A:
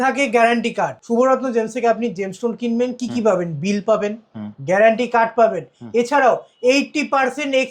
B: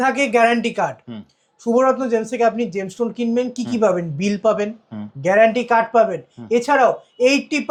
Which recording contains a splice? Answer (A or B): A